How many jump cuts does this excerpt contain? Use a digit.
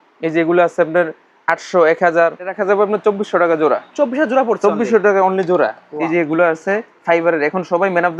2